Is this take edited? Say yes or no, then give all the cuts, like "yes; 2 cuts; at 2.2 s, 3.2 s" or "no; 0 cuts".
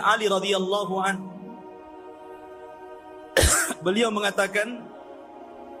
no; 0 cuts